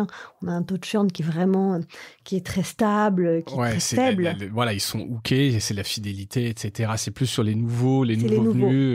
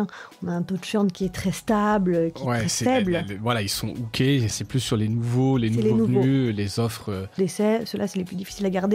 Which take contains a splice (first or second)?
second